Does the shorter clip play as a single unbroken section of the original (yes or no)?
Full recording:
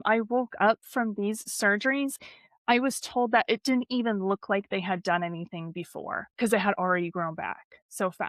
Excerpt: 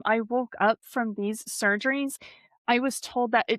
yes